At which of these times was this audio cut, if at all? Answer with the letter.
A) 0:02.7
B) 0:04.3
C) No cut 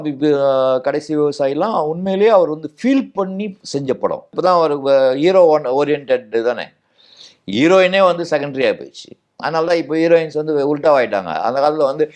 B